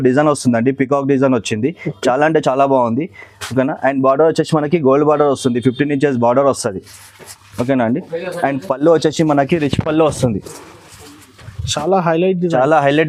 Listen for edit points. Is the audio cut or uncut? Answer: uncut